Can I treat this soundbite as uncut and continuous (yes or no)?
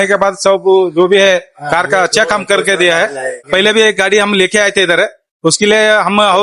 no